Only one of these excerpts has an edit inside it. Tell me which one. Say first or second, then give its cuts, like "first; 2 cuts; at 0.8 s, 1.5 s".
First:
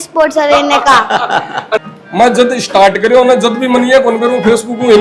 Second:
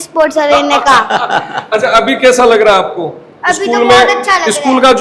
first; 1 cut; at 1.8 s